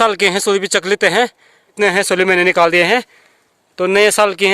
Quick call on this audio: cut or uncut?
cut